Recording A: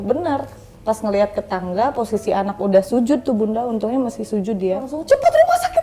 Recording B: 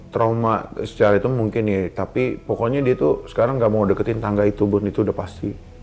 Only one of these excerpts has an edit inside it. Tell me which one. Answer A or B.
A